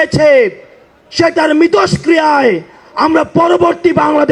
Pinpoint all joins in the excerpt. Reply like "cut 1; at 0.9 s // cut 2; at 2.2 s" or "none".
none